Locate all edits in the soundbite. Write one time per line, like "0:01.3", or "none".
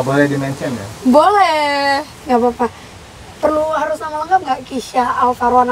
none